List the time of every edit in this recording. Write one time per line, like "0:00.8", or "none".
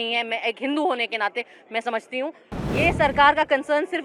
0:02.5

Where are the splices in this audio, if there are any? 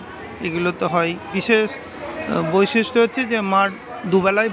0:01.3

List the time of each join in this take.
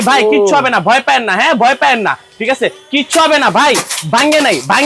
none

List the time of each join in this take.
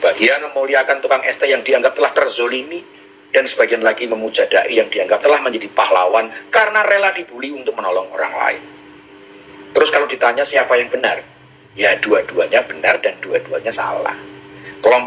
none

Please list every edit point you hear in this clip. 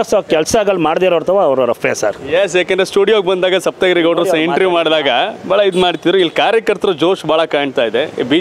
none

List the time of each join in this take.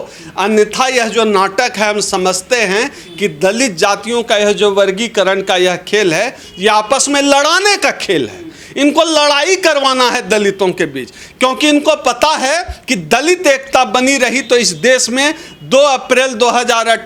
none

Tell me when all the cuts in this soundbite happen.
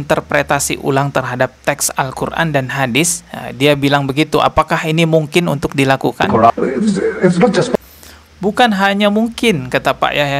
0:06.5

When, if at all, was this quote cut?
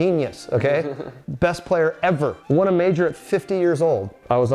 0:01.2

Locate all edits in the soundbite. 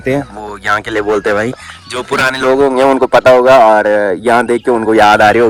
none

